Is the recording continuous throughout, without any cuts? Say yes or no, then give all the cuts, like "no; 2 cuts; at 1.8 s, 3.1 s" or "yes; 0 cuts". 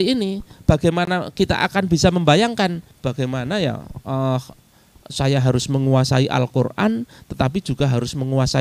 no; 1 cut; at 2.9 s